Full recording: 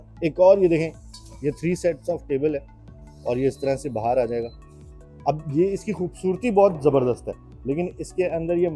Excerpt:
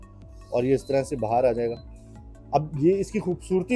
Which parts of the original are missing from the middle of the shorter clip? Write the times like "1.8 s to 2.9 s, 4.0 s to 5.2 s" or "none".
none